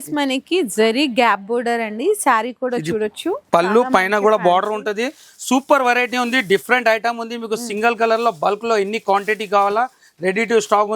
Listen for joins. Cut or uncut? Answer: uncut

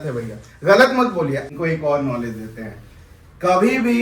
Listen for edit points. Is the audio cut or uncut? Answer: cut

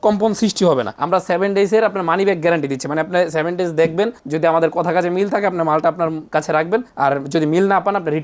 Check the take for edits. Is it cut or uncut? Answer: cut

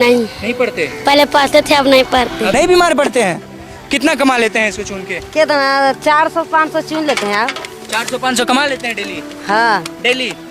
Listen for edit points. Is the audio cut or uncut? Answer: cut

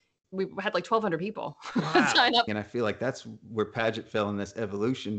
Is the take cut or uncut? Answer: cut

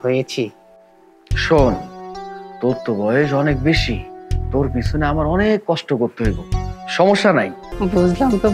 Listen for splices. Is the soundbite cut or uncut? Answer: cut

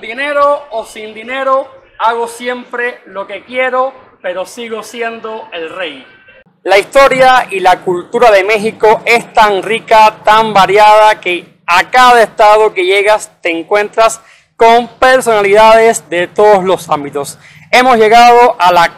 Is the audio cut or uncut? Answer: uncut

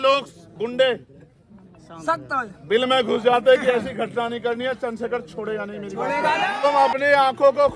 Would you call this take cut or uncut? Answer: cut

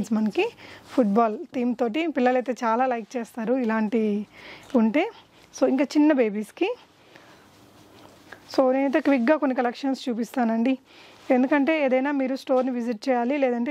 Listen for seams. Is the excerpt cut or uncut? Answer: uncut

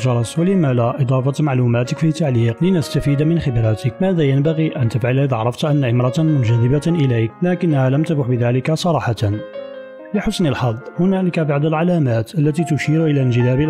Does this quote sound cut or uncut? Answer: cut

